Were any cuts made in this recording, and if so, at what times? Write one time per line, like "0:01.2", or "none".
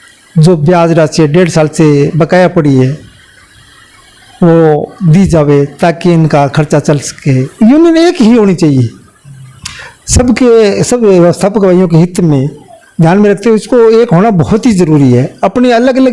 0:07.5